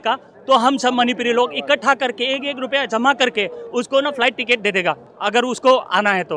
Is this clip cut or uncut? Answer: cut